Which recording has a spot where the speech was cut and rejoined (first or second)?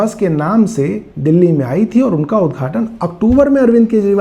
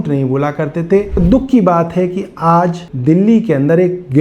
second